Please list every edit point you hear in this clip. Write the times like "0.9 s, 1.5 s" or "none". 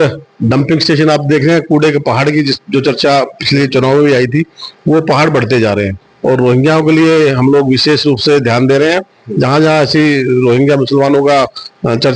6.1 s